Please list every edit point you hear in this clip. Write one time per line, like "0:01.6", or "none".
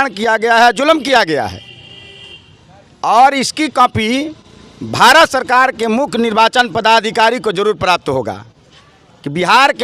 none